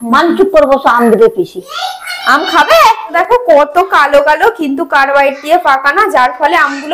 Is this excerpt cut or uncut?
cut